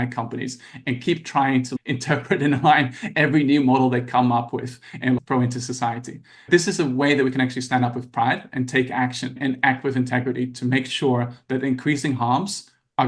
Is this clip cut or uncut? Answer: uncut